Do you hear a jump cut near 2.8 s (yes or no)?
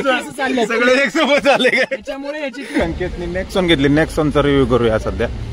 yes